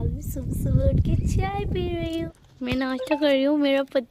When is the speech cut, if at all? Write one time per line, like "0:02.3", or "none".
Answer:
0:02.3